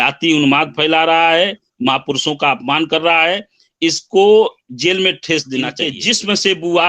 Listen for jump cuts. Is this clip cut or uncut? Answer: cut